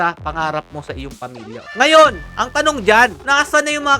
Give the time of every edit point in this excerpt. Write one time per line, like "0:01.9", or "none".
0:01.6